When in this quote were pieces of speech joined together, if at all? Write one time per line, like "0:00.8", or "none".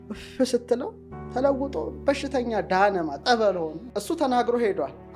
0:03.9